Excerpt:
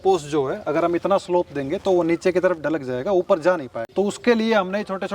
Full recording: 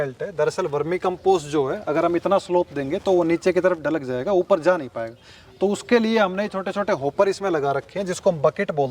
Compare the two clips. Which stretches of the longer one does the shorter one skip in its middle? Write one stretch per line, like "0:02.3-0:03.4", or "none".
0:05.0-0:05.4